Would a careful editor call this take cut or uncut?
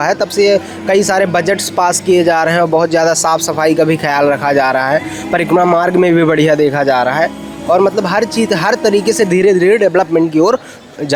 uncut